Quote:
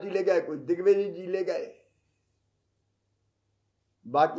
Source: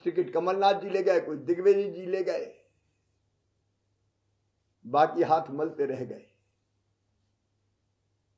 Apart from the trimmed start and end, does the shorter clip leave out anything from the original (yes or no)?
no